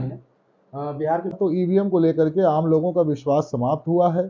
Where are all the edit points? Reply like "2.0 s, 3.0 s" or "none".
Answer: 1.4 s

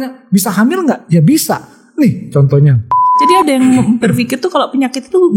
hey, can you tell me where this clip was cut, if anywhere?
3.1 s

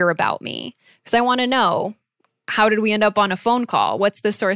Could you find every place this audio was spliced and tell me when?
none

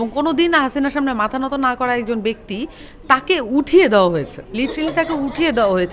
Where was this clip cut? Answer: 4.4 s

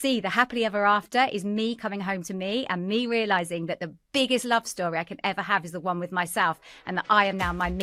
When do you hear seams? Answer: none

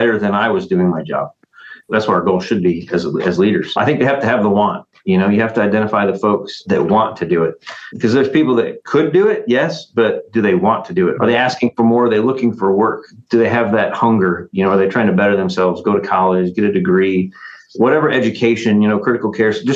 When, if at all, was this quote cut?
1.9 s, 3.8 s, 6.6 s, 11.2 s, 13.1 s

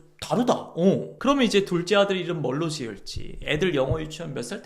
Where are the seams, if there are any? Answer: 1.1 s

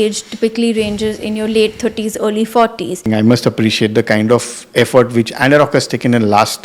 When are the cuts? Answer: 3.0 s

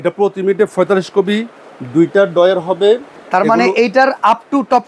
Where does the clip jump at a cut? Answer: 3.2 s

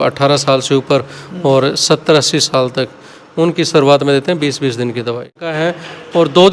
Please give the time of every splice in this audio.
5.5 s

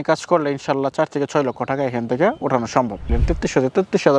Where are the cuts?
3.1 s

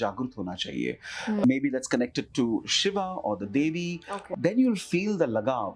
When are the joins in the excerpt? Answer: 1.4 s, 4.1 s

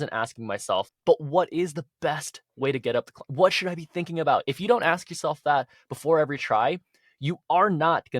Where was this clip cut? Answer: 0.9 s

